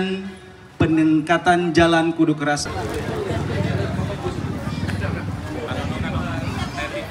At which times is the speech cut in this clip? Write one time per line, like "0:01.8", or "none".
0:02.6